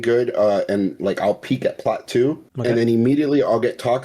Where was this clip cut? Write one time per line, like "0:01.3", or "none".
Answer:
0:02.5

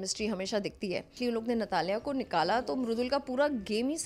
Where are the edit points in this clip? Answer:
0:01.1

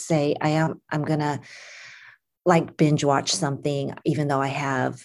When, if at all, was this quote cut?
none

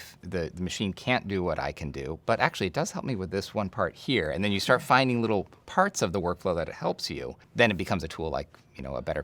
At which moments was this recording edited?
0:07.4

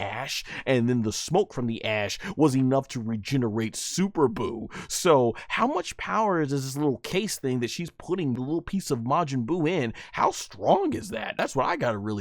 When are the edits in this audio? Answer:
0:08.4
0:11.4

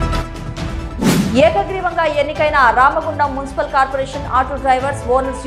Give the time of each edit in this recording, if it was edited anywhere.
0:01.1

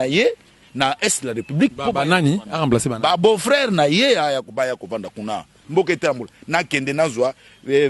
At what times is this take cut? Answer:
0:05.5

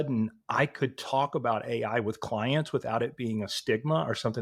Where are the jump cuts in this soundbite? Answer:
none

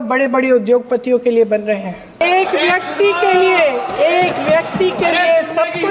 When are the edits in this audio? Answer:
0:02.2

